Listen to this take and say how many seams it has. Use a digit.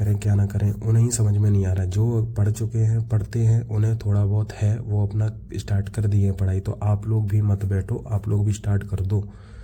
0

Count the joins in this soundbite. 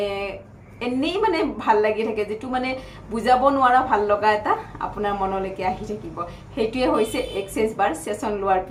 0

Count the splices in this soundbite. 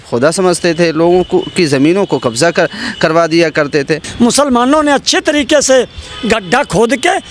1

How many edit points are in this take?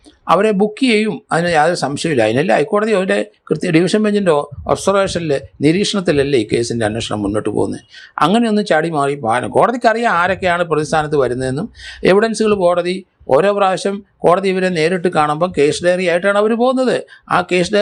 0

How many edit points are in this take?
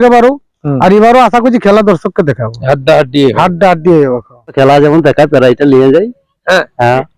1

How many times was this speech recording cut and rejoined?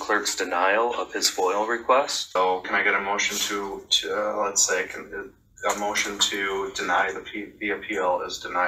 1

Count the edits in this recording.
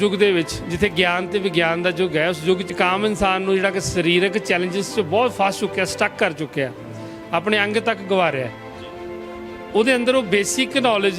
1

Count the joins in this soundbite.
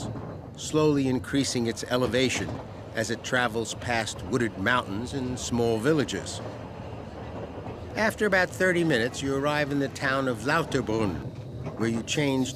0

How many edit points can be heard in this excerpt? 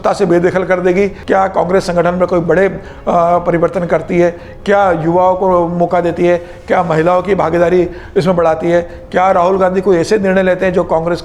1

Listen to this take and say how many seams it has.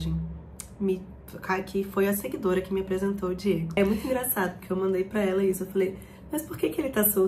1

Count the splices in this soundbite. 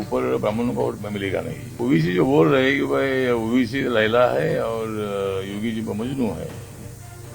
1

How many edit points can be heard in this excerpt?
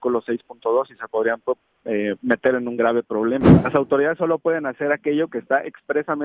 1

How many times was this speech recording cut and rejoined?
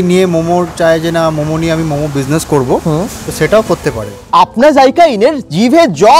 1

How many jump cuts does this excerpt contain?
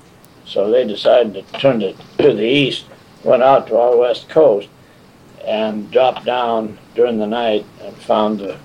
1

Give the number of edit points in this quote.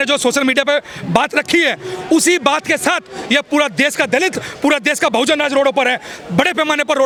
0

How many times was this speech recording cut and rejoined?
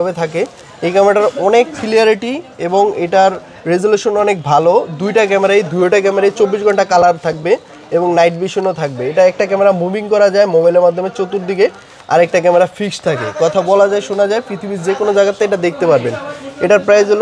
0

